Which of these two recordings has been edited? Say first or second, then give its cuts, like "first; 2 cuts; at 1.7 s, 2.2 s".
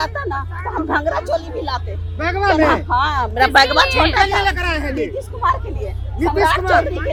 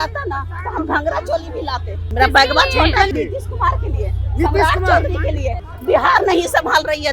second; 3 cuts; at 2.1 s, 3.1 s, 5.6 s